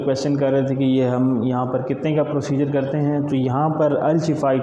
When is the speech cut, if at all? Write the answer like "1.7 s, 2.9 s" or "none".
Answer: none